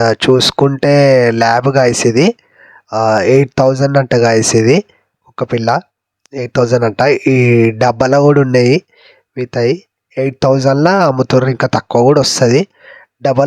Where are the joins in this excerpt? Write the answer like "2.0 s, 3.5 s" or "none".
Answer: none